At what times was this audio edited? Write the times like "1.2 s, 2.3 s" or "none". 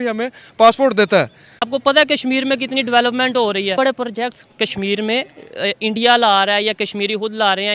1.7 s